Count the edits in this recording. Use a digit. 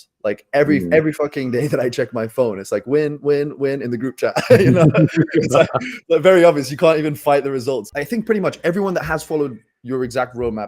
1